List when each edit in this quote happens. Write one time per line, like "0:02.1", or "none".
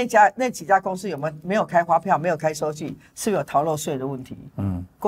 none

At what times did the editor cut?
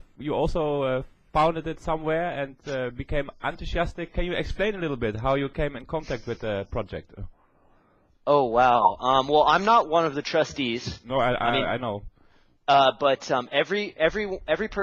0:08.8

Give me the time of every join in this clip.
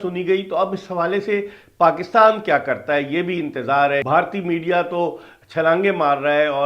0:04.0

